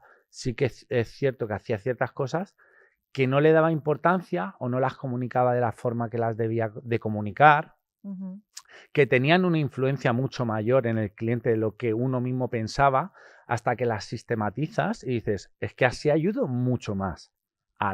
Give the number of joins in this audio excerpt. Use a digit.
0